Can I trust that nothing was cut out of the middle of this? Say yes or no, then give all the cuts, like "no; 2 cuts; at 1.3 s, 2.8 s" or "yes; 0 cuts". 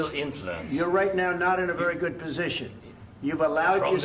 yes; 0 cuts